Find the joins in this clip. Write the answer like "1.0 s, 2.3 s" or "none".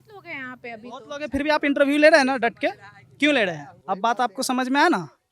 3.7 s